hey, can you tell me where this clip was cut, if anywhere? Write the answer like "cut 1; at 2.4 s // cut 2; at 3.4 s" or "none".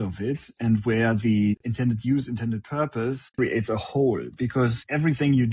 cut 1; at 3.2 s